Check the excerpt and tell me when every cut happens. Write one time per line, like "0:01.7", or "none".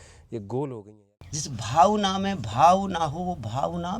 0:00.9